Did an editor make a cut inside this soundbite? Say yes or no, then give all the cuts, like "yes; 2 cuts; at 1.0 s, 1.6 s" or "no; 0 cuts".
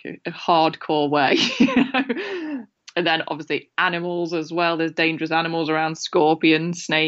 yes; 1 cut; at 2.7 s